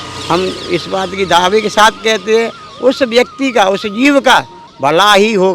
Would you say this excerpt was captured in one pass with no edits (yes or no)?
no